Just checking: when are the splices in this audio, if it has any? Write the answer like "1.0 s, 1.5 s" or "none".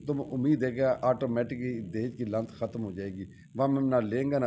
none